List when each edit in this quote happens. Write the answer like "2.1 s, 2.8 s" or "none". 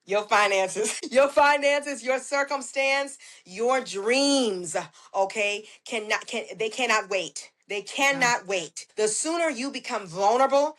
1.0 s, 8.8 s